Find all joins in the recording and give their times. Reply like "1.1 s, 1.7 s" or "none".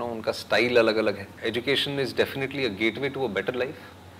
1.3 s